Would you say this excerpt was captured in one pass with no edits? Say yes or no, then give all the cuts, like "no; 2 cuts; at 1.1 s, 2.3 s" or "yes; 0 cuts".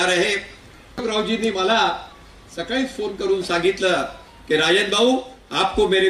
no; 1 cut; at 1.0 s